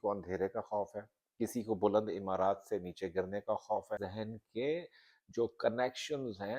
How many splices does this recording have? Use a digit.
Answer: 1